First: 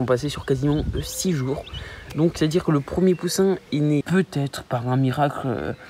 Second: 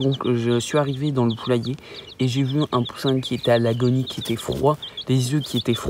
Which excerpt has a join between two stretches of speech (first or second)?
first